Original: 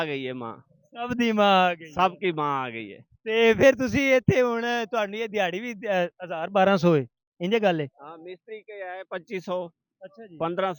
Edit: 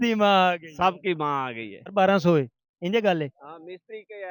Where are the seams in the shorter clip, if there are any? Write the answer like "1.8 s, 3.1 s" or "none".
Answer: 1.8 s